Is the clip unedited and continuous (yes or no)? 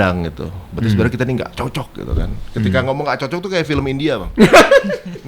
yes